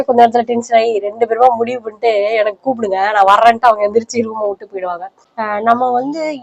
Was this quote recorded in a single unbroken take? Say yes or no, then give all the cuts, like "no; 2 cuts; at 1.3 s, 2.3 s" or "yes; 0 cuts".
no; 1 cut; at 5.2 s